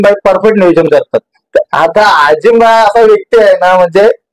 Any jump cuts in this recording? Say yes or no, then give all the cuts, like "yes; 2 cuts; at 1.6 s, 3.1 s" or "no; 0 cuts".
yes; 1 cut; at 1.4 s